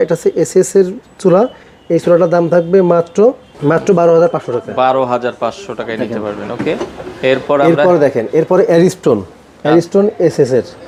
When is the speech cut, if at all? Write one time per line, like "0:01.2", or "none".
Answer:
none